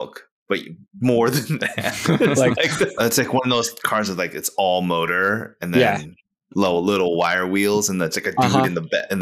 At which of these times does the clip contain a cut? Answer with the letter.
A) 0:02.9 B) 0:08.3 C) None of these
A